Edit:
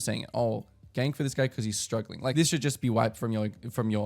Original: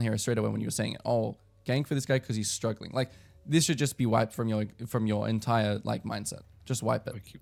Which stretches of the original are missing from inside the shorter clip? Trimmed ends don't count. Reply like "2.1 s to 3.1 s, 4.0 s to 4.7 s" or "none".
3.0 s to 3.5 s

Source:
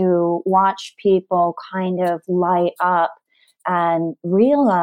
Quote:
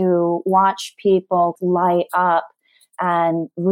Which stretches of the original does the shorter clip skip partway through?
1.6 s to 2.2 s

